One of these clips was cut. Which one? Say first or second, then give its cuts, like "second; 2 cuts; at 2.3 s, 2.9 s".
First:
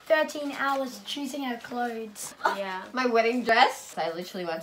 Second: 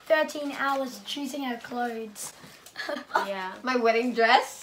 first; 2 cuts; at 2.3 s, 3.5 s